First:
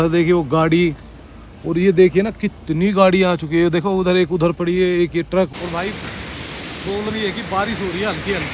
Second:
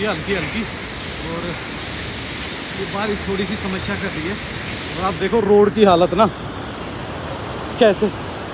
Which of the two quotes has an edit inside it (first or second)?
first